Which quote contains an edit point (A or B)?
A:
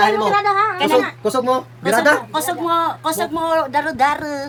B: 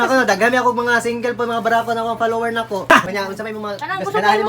B